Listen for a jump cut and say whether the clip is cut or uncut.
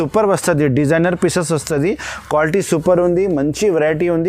uncut